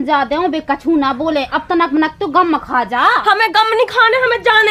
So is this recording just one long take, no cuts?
yes; 0 cuts

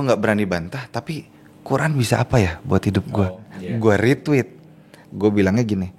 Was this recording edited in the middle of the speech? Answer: yes; 1 cut; at 3.2 s

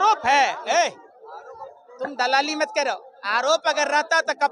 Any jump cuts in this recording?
no; 0 cuts

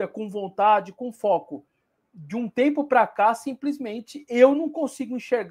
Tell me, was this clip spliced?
no; 0 cuts

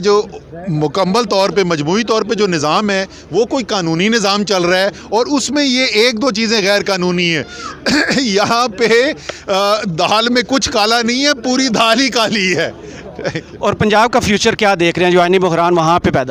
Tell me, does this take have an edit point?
no; 0 cuts

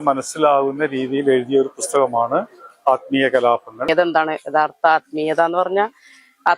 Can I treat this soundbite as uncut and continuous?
no; 1 cut; at 3.9 s

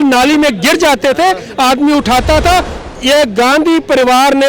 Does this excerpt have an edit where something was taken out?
yes; 1 cut; at 2.7 s

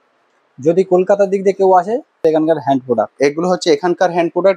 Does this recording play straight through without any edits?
no; 1 cut; at 2.2 s

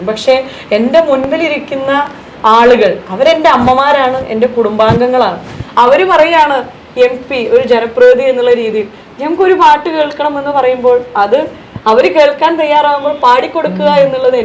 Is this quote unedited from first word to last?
yes; 0 cuts

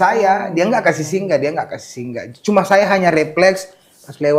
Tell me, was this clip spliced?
no; 0 cuts

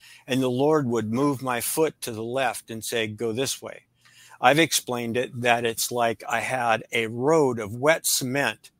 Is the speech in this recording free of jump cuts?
yes; 0 cuts

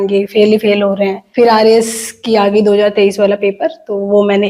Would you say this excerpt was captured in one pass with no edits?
yes; 0 cuts

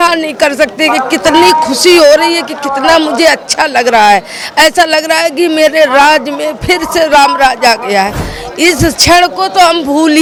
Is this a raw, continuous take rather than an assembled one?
yes; 0 cuts

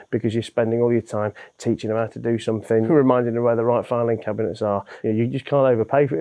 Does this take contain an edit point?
yes; 2 cuts; at 2.8 s, 4.9 s

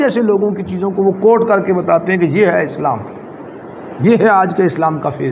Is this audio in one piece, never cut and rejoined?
yes; 0 cuts

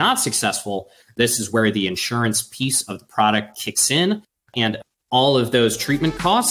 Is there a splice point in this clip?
yes; 2 cuts; at 1.0 s, 4.9 s

